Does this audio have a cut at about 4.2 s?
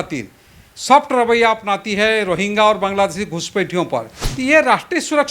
yes; 1 cut; at 4.2 s

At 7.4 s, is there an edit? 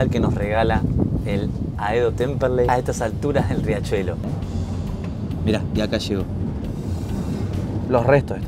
no; 2 cuts; at 2.7 s, 4.2 s

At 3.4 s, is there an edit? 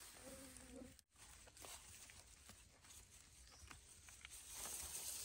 no; 1 cut; at 1.1 s

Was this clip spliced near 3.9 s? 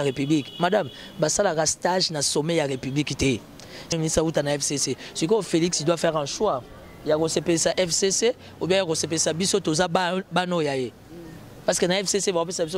yes; 1 cut; at 3.9 s

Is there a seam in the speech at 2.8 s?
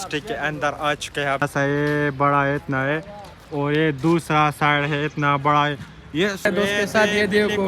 no; 2 cuts; at 1.4 s, 6.4 s

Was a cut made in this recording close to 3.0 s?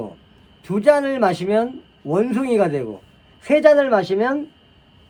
no; 0 cuts

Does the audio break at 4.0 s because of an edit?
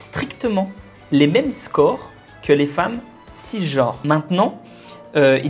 yes; 1 cut; at 4.0 s

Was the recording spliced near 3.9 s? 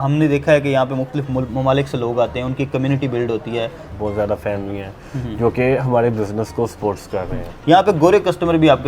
yes; 2 cuts; at 3.9 s, 7.5 s

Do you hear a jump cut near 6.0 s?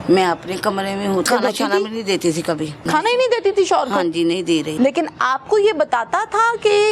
no; 3 cuts; at 1.3 s, 2.9 s, 4.7 s

